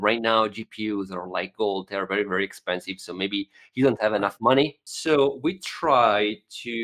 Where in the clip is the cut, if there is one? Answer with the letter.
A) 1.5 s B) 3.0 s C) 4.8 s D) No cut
C